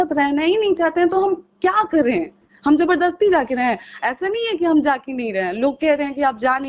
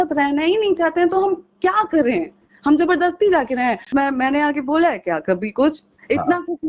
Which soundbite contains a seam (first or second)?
second